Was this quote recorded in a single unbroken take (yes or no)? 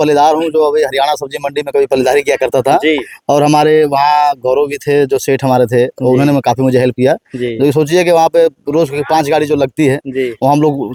yes